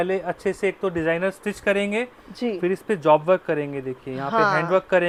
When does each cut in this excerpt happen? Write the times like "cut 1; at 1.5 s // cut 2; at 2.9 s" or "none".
none